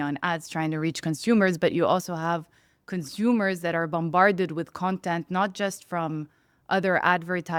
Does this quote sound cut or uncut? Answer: uncut